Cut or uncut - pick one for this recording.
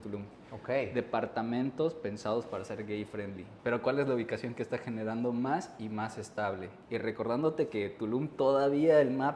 cut